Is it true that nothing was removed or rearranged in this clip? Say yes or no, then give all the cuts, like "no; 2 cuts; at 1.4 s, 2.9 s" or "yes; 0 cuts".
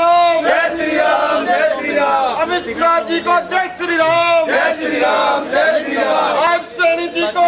yes; 0 cuts